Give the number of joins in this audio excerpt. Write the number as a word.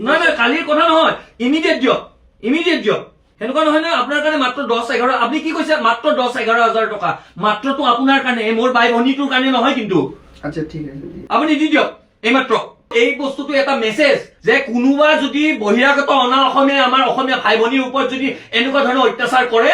zero